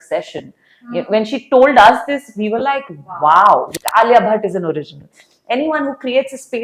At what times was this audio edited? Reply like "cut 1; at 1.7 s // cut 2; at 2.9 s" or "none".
cut 1; at 3.8 s